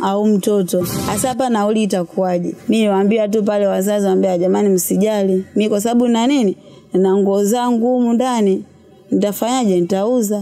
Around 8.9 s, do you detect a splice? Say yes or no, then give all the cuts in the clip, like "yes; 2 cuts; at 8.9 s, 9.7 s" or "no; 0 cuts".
no; 2 cuts; at 1.0 s, 2.5 s